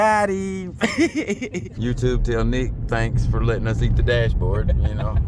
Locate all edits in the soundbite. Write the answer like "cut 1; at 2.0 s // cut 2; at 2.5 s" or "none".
cut 1; at 1.7 s

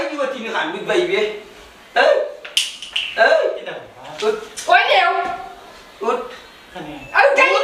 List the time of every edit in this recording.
none

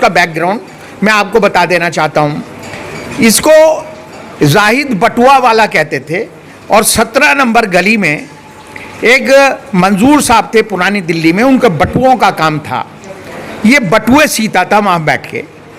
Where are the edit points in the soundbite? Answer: none

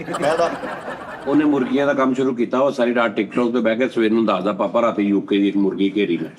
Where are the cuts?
cut 1; at 1.1 s

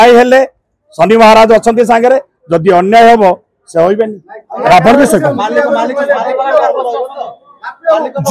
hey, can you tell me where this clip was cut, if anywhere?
none

